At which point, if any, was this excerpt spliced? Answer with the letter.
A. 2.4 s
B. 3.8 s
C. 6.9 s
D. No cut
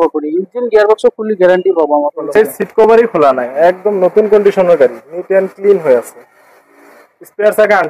A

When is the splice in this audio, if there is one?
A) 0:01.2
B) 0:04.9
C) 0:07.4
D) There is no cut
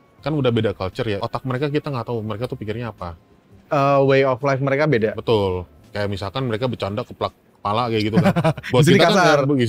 A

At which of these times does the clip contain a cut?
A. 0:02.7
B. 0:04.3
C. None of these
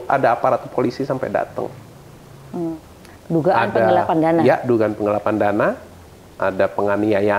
A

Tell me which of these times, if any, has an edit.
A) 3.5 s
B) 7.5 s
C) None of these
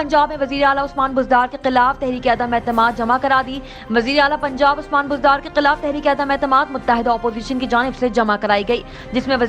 C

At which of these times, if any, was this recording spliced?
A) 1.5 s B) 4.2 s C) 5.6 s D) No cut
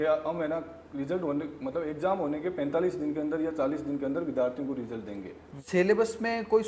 C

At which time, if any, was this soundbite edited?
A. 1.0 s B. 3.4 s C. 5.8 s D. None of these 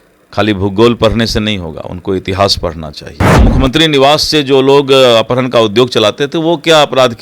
B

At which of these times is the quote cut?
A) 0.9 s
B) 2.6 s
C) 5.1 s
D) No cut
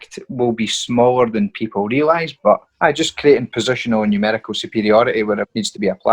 B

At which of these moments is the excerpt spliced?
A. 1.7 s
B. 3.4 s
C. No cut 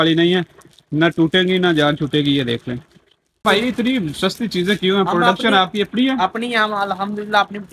B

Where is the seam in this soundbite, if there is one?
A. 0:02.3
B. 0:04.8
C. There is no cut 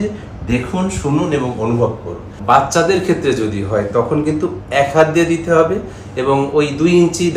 A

